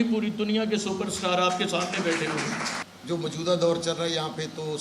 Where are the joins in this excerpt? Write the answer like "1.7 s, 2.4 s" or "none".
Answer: 2.9 s